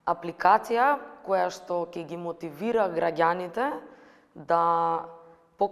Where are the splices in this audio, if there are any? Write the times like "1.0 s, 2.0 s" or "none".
none